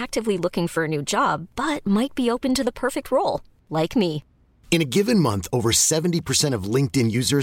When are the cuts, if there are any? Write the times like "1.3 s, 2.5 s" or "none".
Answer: none